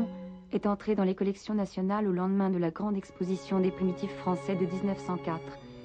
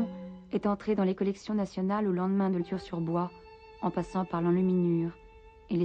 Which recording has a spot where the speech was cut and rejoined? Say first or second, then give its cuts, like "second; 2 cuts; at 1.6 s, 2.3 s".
first; 1 cut; at 2.6 s